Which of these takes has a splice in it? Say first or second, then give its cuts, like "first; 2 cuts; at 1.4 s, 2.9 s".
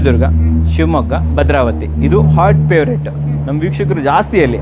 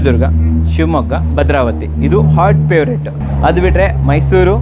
second; 1 cut; at 3.2 s